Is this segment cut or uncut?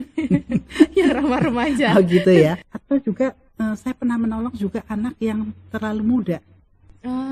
cut